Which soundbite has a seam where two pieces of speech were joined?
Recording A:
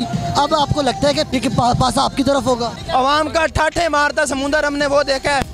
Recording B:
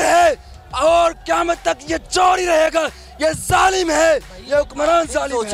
A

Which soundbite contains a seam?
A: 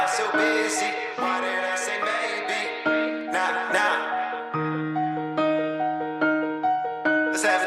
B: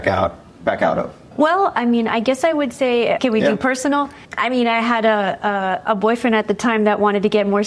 B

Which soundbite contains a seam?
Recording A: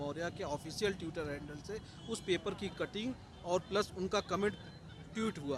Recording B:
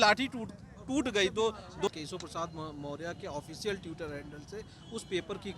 B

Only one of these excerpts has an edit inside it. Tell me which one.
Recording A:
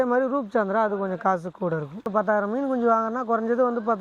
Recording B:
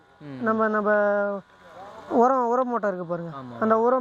A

